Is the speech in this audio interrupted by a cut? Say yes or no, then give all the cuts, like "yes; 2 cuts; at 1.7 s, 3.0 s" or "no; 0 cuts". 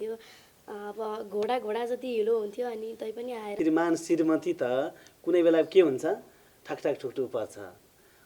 yes; 1 cut; at 3.5 s